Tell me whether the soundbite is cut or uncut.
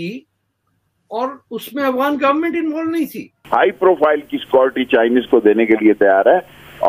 cut